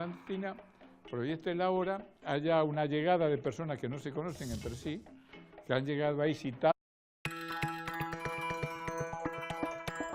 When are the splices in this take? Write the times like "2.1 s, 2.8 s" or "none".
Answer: none